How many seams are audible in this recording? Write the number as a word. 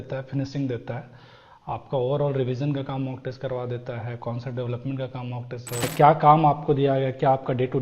one